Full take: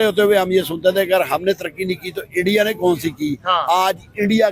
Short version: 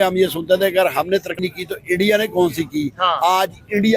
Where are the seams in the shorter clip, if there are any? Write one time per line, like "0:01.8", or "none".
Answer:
0:01.3